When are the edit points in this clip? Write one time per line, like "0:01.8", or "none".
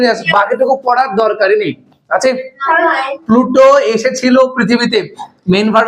0:03.1